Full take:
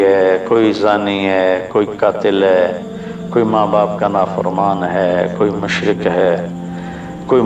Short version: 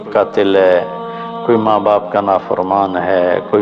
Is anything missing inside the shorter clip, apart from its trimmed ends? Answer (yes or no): no